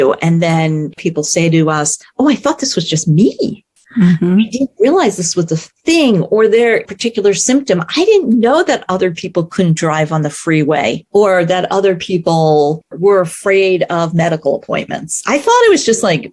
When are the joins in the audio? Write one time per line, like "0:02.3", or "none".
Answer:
0:01.0
0:02.0
0:06.9
0:11.0
0:13.0

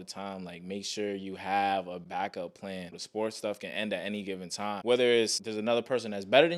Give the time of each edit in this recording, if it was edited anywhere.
0:02.0
0:03.0
0:04.7
0:05.4

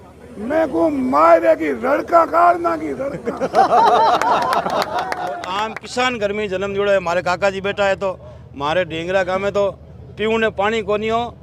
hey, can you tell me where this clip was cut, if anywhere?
0:05.5

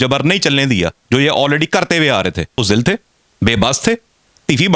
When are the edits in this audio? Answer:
0:02.6

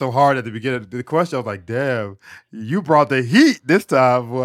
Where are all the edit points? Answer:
none

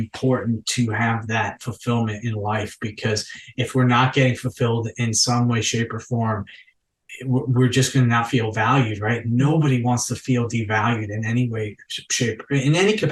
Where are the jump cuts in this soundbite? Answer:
none

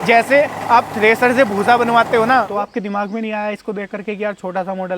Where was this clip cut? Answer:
0:02.5

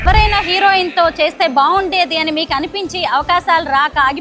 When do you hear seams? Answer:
none

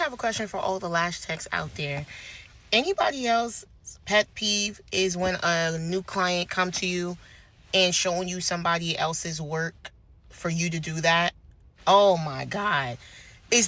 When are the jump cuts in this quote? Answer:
none

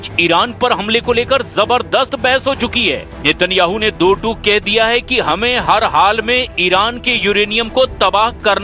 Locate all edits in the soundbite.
0:04.3

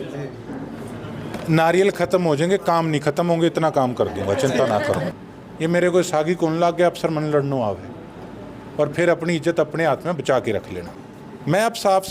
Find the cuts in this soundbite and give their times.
0:05.2
0:10.9

